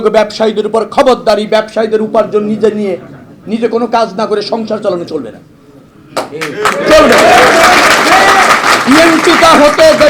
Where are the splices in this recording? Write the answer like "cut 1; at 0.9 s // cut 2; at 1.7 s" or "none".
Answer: none